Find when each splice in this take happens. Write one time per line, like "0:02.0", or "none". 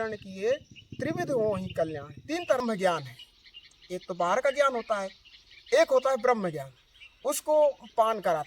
0:02.6

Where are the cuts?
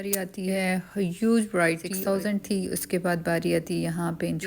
0:01.9

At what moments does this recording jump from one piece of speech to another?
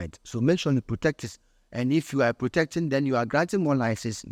none

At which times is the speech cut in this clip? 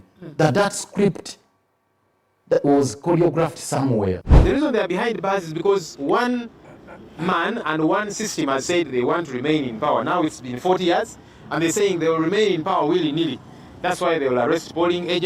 0:04.3

